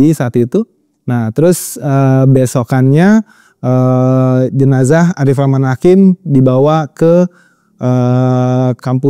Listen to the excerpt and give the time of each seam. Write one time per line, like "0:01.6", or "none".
none